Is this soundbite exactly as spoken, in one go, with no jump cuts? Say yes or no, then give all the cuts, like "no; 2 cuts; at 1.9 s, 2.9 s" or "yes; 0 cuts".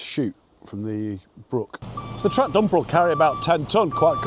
no; 1 cut; at 1.9 s